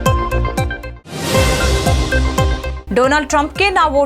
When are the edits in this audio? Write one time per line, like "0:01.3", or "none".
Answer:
0:00.9
0:02.7